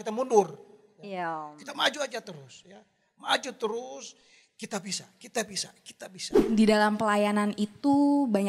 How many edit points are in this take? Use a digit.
1